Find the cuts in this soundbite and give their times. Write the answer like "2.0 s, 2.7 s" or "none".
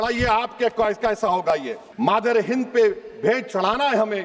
1.8 s